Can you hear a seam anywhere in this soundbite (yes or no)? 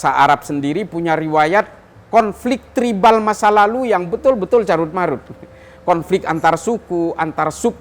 no